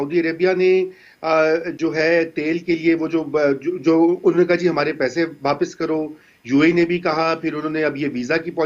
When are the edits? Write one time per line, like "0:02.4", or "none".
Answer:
none